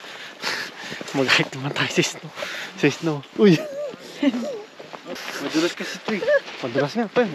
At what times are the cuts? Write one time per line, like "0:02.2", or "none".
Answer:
0:05.1